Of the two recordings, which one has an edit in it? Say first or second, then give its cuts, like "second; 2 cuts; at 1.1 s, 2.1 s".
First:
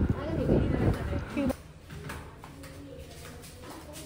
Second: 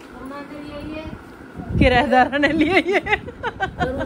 first; 1 cut; at 1.5 s